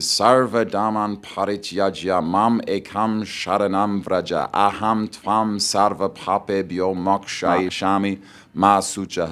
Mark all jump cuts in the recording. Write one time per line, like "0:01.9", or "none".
0:07.7